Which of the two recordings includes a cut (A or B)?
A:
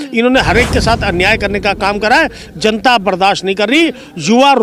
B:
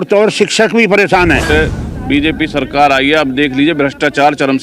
B